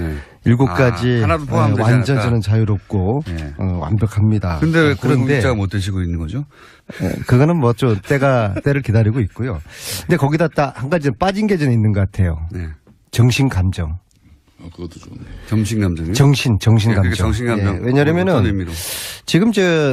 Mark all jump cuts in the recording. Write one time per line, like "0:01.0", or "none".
0:10.4